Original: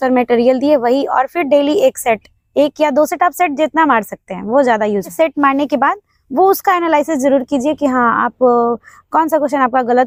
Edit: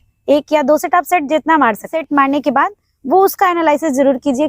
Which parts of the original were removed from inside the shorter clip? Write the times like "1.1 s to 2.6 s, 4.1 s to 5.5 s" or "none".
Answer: 4.2 s to 5.2 s